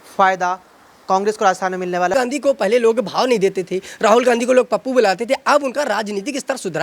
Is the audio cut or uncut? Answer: cut